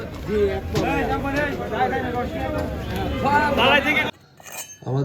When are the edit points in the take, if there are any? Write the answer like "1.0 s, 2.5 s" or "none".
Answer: 4.1 s